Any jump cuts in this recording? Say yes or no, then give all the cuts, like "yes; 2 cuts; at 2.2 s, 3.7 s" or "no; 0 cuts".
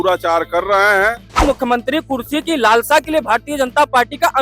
yes; 1 cut; at 1.4 s